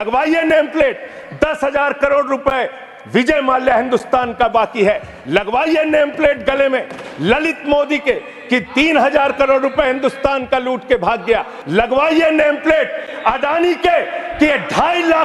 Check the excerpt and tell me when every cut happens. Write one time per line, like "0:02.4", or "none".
0:11.6